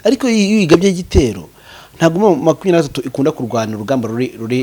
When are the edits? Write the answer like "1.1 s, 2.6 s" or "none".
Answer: none